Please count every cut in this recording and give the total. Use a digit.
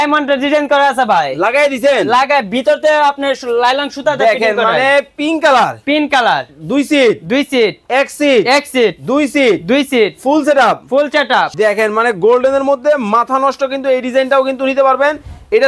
1